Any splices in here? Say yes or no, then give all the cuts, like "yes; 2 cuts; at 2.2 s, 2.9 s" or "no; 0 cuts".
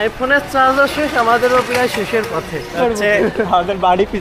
yes; 1 cut; at 2.8 s